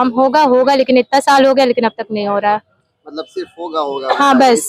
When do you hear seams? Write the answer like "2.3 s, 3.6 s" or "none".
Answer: none